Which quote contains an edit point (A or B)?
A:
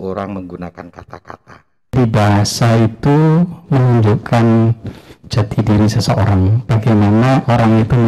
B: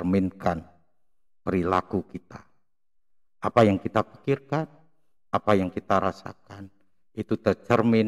A